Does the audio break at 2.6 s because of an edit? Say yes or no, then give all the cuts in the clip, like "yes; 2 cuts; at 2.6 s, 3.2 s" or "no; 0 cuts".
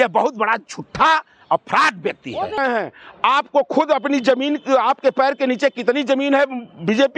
yes; 1 cut; at 2.6 s